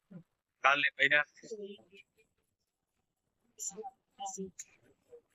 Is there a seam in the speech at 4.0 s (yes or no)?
no